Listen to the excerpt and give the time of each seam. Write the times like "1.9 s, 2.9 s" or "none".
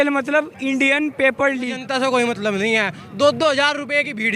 1.8 s